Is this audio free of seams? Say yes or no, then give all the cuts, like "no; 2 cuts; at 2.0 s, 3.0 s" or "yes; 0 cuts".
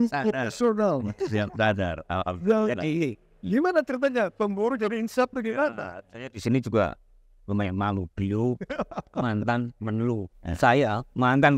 no; 1 cut; at 10.4 s